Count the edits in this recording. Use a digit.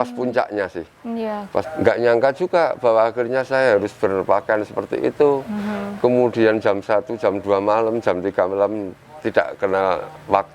1